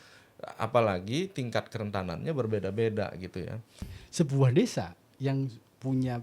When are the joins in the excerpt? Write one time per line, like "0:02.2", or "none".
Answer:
0:03.9